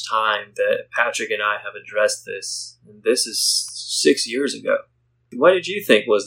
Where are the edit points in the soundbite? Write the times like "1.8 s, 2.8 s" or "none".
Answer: 5.3 s